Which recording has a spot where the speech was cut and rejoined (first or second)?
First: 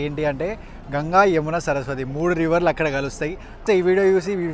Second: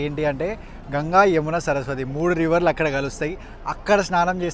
first